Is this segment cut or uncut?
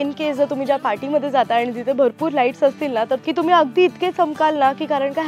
uncut